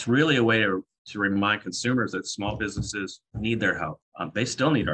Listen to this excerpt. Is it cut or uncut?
cut